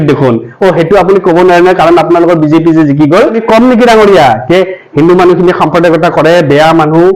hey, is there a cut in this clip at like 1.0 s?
no; 1 cut; at 3.4 s

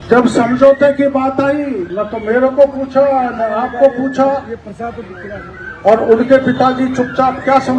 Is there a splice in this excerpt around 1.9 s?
yes; 1 cut; at 1.9 s

